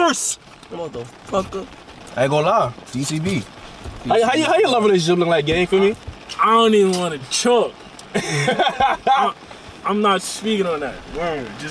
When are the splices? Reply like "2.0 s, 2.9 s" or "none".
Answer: none